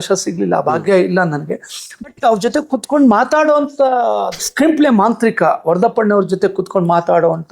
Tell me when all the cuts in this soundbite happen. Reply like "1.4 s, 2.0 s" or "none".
4.5 s